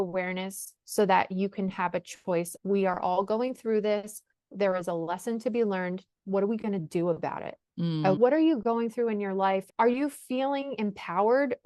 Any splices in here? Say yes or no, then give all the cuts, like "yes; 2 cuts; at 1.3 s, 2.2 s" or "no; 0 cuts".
yes; 3 cuts; at 2.5 s, 8.2 s, 9.7 s